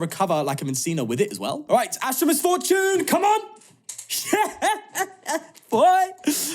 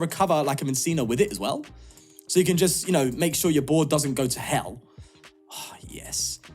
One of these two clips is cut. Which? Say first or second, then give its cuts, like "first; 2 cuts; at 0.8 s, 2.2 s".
first; 1 cut; at 1.6 s